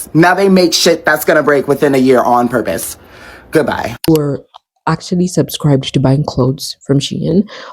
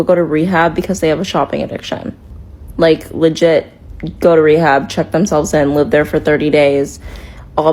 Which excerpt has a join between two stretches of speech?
first; 1 cut; at 4.1 s

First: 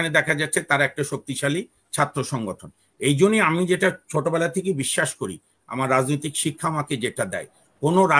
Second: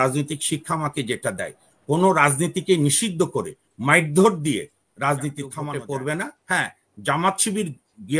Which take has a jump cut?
second; 1 cut; at 5.6 s

